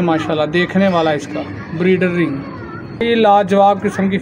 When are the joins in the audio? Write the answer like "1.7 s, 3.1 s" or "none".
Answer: none